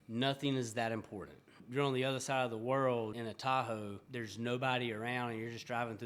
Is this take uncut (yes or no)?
no